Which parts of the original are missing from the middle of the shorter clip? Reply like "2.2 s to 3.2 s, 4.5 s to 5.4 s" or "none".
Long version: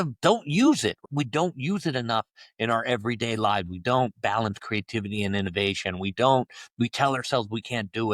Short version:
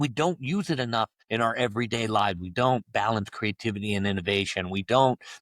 2.3 s to 2.4 s